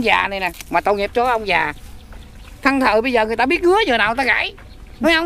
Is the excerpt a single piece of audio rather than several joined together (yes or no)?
yes